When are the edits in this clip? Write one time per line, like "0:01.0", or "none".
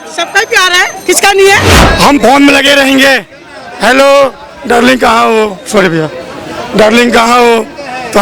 0:01.7